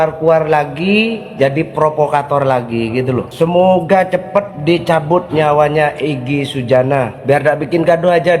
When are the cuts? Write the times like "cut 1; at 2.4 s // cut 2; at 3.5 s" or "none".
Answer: cut 1; at 1.2 s // cut 2; at 3.3 s // cut 3; at 4.5 s // cut 4; at 7.2 s